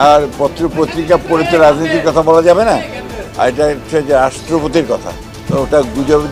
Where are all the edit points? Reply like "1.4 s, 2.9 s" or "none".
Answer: none